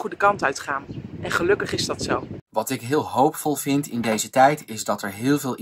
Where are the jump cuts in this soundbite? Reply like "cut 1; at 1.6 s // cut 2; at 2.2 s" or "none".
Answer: cut 1; at 2.4 s